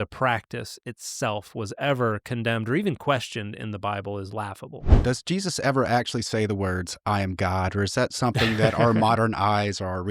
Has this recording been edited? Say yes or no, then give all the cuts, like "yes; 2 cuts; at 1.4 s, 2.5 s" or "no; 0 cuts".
yes; 1 cut; at 4.9 s